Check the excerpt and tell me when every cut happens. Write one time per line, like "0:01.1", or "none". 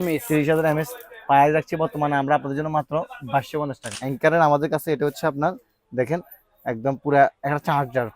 0:03.9

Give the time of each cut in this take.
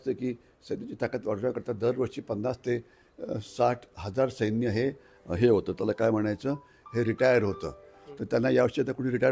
none

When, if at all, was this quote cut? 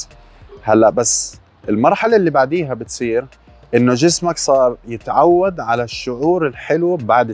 none

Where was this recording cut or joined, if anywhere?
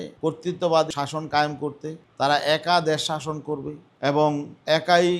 0:00.9

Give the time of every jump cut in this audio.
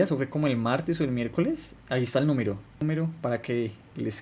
0:02.8

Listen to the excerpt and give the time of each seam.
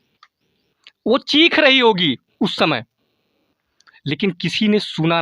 none

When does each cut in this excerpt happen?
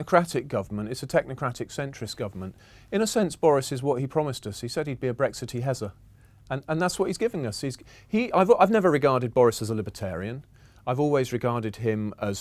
none

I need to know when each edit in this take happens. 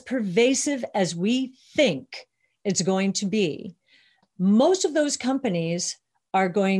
0:04.2

